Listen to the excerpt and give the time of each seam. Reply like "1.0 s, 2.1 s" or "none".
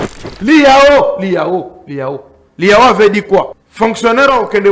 3.6 s